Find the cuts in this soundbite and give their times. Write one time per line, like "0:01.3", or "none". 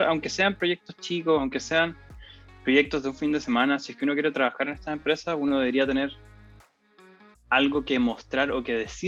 none